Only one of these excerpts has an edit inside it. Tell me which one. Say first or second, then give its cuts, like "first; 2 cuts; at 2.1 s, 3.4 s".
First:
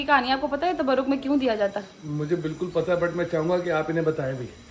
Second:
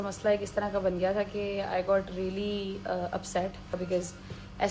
second; 1 cut; at 3.8 s